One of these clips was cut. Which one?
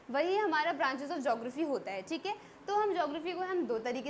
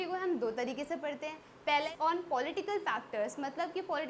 second; 1 cut; at 1.9 s

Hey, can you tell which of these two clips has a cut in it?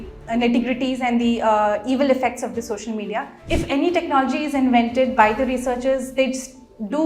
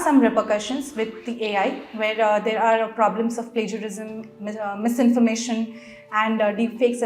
first; 1 cut; at 3.4 s

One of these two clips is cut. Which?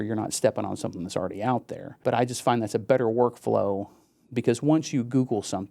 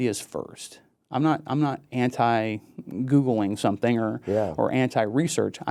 first; 1 cut; at 1.8 s

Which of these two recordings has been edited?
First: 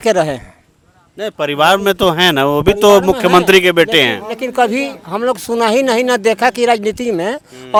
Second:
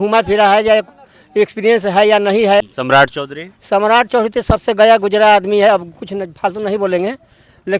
second; 1 cut; at 2.7 s

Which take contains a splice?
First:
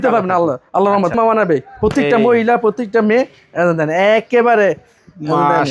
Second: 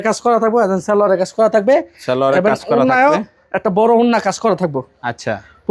first; 1 cut; at 1.1 s

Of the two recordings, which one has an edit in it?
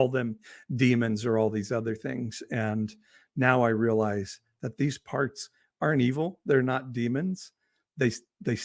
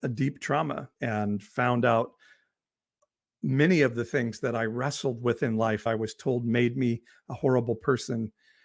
second; 2 cuts; at 0.9 s, 5.8 s

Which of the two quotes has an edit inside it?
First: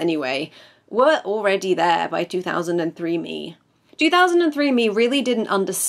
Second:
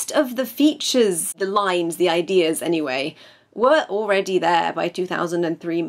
second; 1 cut; at 1.4 s

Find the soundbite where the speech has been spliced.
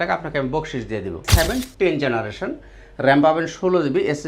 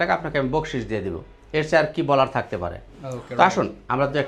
first; 1 cut; at 1.3 s

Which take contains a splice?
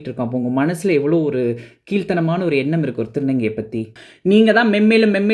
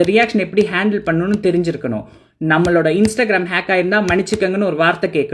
first; 1 cut; at 4.0 s

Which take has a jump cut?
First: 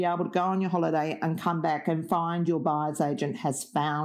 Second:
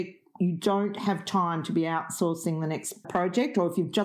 second; 1 cut; at 3.1 s

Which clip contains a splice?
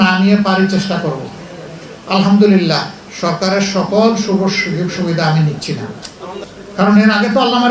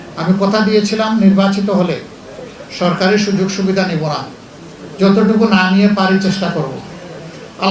first; 1 cut; at 6.4 s

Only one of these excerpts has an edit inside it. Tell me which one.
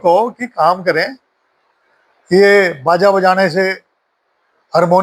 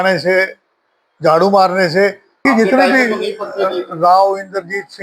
second; 1 cut; at 2.5 s

